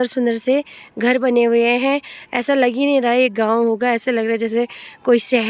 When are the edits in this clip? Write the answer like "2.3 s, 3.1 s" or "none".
none